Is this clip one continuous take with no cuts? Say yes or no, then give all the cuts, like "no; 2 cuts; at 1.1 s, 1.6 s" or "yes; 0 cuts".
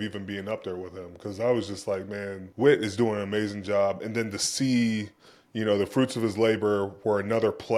no; 1 cut; at 2.4 s